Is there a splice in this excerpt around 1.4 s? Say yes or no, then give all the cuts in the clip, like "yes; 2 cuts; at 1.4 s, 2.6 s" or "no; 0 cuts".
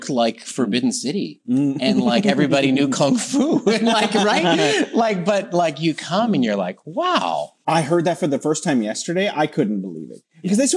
no; 1 cut; at 7.5 s